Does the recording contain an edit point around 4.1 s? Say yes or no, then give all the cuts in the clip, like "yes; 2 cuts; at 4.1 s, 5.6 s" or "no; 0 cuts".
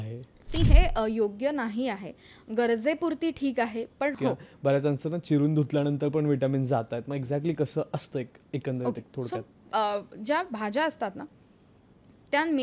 yes; 1 cut; at 4.1 s